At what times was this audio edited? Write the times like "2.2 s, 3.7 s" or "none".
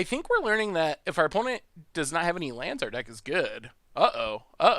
none